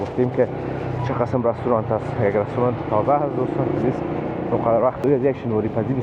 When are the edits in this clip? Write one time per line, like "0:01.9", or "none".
0:05.0